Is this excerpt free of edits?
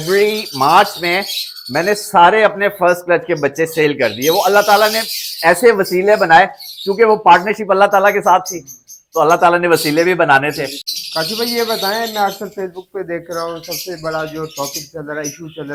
yes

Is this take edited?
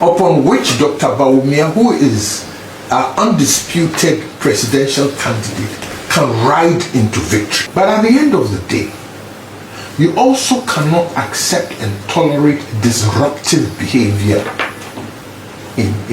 yes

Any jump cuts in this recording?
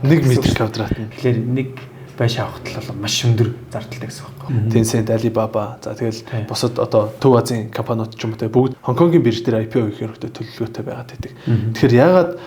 yes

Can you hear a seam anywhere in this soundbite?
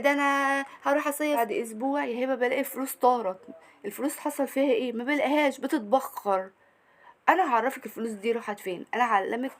yes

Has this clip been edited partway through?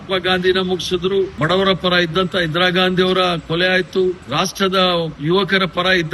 yes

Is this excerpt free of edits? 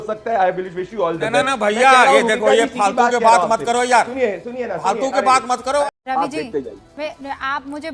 no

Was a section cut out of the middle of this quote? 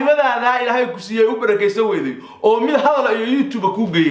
no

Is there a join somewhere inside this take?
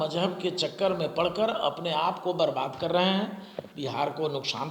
no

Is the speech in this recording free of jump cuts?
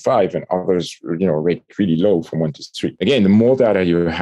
no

